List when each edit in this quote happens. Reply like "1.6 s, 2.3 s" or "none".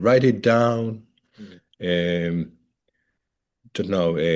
none